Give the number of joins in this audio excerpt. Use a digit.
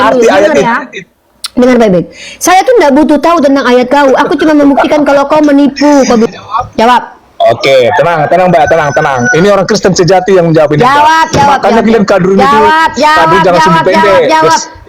1